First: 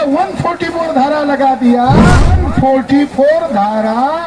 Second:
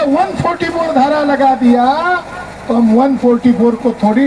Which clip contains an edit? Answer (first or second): first